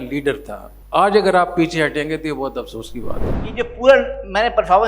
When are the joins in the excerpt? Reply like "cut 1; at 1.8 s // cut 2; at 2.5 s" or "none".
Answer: cut 1; at 3.4 s